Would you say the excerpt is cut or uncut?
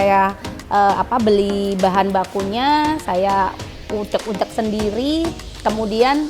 uncut